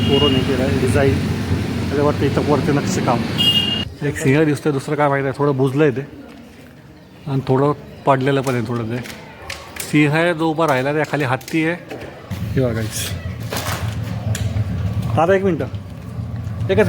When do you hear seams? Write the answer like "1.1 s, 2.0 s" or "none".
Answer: 3.8 s, 12.1 s